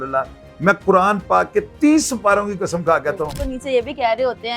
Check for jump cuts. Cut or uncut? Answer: cut